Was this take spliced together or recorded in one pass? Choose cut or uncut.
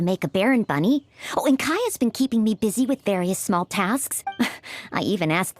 cut